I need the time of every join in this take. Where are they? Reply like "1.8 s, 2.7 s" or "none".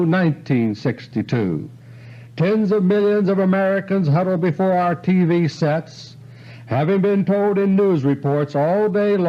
6.9 s